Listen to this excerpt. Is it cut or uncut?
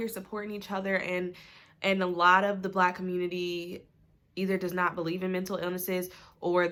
uncut